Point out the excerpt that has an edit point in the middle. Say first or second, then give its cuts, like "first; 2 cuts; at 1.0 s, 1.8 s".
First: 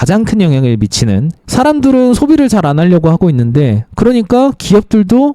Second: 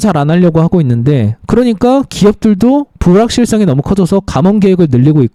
first; 1 cut; at 1.4 s